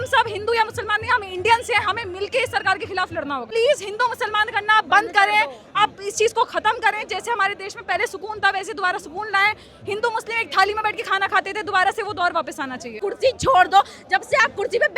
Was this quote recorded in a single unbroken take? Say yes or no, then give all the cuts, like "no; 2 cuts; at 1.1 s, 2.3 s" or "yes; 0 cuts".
no; 2 cuts; at 3.5 s, 13.0 s